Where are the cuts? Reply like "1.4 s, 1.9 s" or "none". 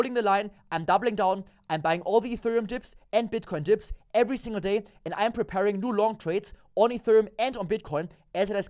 none